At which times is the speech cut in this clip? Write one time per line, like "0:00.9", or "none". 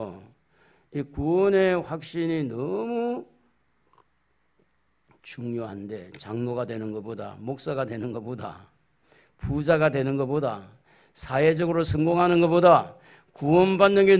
none